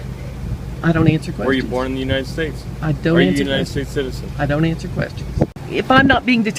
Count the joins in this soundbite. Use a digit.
1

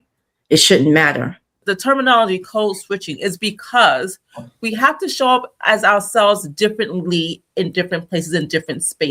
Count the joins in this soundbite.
1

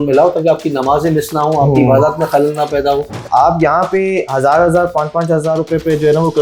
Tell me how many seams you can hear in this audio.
1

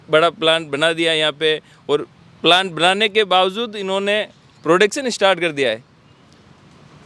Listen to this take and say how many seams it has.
0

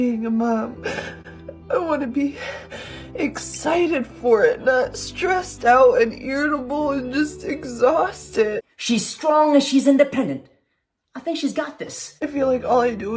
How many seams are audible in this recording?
1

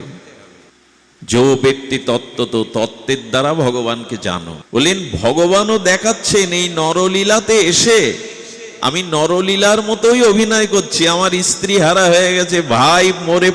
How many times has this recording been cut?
1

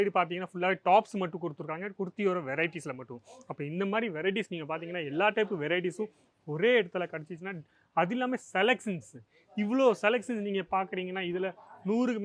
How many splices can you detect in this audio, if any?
0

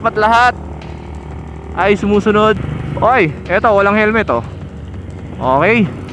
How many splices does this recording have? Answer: 1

